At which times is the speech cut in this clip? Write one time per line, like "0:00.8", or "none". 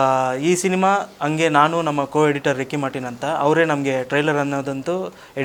none

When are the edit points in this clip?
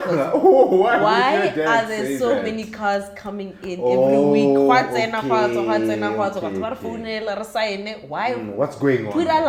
none

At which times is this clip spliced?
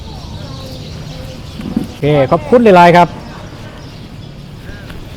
0:02.0

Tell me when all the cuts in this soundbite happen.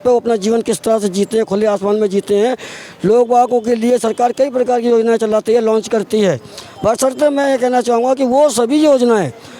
none

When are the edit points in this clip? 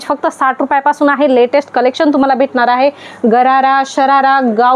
none

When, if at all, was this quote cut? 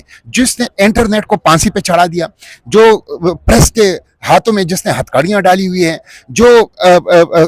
none

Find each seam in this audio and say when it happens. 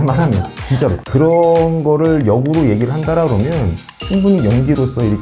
0:01.0

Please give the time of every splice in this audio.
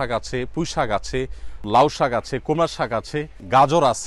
0:01.7

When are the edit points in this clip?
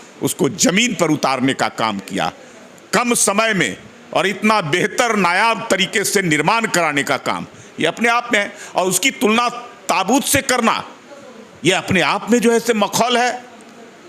none

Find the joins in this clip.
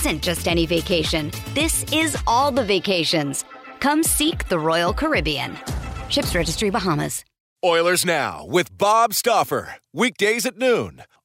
0:07.4

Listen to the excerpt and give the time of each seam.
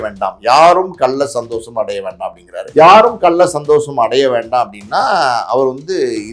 0:02.6

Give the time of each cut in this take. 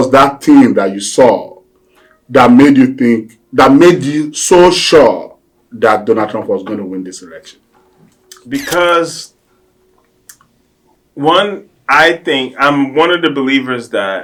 none

